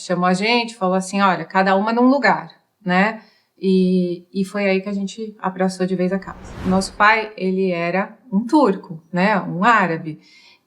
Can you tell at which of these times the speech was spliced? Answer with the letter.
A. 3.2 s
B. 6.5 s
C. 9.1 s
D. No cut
B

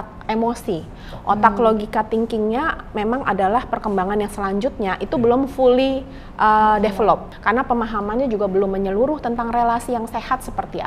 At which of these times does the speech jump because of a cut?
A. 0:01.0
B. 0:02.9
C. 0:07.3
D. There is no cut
C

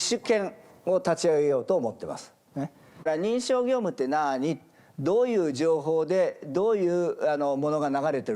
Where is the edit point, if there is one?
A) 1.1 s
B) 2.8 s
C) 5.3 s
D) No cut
B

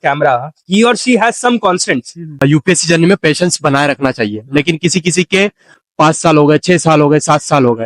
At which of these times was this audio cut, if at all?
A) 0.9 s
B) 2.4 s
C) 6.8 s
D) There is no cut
B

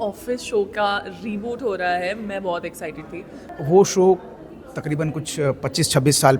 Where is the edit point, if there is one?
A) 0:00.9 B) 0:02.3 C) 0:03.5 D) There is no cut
C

